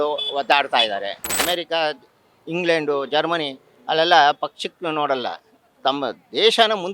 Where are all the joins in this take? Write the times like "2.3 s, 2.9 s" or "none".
1.4 s